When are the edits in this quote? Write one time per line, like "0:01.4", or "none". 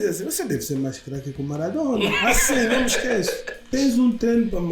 0:03.7